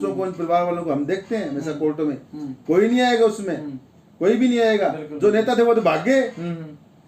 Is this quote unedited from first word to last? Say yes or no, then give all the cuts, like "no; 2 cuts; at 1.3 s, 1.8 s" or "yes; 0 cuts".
yes; 0 cuts